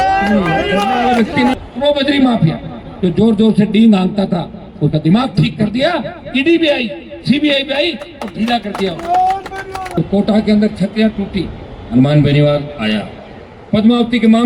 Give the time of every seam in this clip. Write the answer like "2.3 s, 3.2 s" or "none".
1.5 s, 10.0 s